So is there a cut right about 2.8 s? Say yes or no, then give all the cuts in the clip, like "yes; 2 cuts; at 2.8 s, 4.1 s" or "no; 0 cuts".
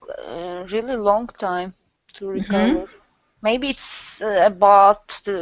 yes; 1 cut; at 2.8 s